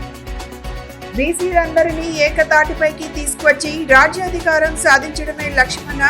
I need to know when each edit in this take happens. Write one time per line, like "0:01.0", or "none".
0:01.1